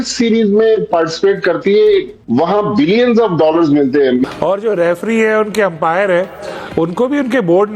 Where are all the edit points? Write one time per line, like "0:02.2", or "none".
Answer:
0:04.3

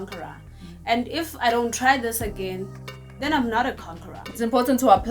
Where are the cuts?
0:04.2

